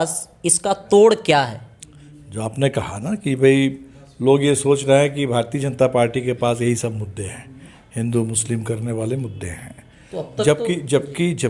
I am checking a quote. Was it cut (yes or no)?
no